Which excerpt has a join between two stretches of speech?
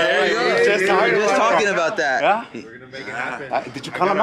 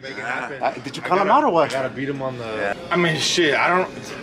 second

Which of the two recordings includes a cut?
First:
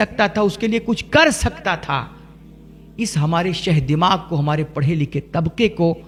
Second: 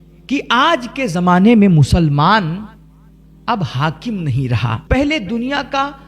second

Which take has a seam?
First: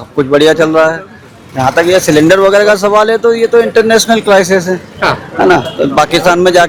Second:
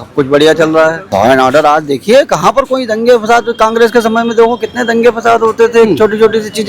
second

